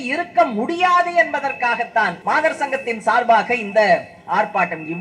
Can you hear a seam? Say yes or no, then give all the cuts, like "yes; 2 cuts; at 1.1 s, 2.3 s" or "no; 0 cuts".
yes; 1 cut; at 2.2 s